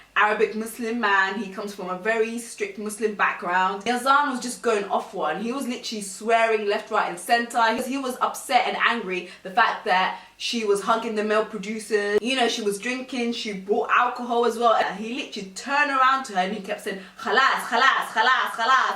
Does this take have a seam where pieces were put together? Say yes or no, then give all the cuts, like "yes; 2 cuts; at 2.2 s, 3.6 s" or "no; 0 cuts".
yes; 3 cuts; at 3.8 s, 7.8 s, 14.8 s